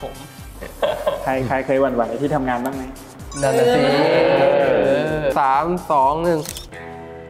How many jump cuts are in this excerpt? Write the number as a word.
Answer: one